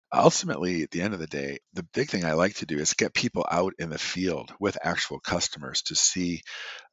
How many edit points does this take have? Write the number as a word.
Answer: one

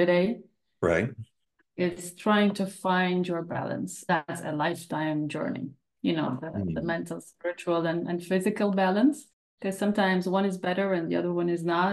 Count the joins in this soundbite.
one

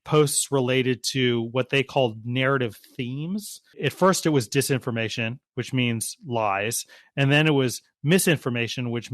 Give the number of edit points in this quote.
one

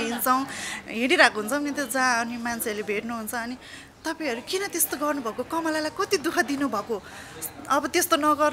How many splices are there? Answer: zero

